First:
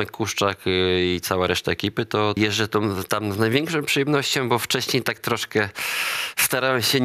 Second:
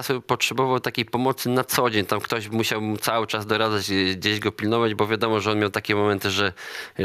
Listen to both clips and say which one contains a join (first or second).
first